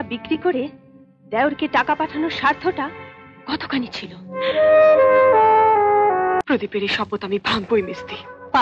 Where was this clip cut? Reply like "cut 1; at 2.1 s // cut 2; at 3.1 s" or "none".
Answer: cut 1; at 6.4 s